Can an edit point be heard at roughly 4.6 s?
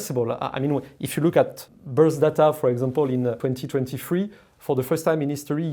no; 2 cuts; at 1.7 s, 3.4 s

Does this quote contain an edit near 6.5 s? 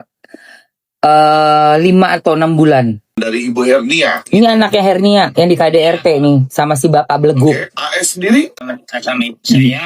no; 2 cuts; at 3.1 s, 8.6 s

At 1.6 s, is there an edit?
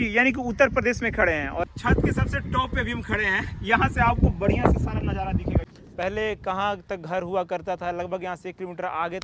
yes; 2 cuts; at 1.6 s, 5.6 s

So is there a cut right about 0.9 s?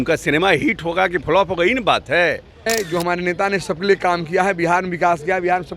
no; 1 cut; at 2.7 s

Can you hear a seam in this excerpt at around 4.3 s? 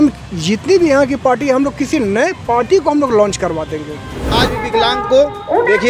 yes; 1 cut; at 4.3 s

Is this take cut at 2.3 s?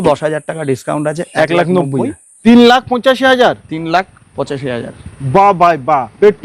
yes; 1 cut; at 2.3 s

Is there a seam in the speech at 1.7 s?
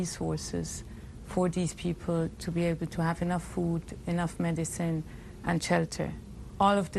no; 0 cuts

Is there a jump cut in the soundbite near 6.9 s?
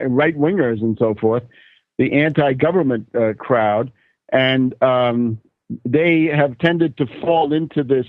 no; 1 cut; at 5.1 s

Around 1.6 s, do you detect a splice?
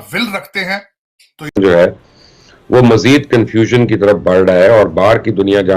yes; 1 cut; at 1.6 s

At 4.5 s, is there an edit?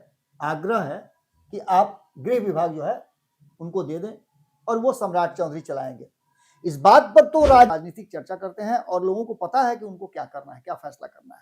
no; 1 cut; at 7.7 s

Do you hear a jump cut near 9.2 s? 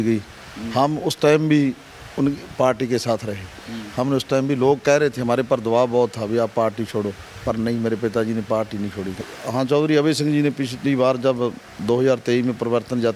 yes; 1 cut; at 9.2 s

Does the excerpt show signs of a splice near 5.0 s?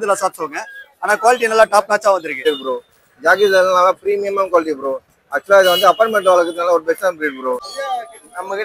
no; 2 cuts; at 2.4 s, 7.6 s

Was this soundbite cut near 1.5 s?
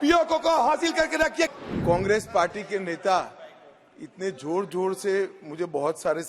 yes; 1 cut; at 1.5 s

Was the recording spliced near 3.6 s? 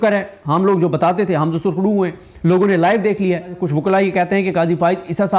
yes; 1 cut; at 3.6 s

